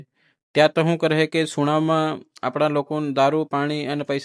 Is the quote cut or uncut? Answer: uncut